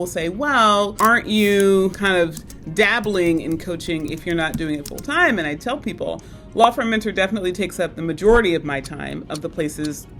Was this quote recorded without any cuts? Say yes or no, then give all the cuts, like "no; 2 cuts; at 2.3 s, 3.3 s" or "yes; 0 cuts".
no; 2 cuts; at 0.9 s, 2.0 s